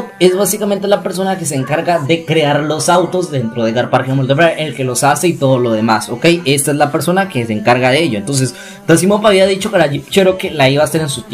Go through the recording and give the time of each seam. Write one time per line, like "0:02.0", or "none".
none